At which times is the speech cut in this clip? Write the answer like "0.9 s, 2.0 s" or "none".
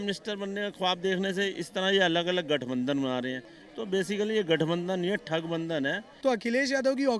6.1 s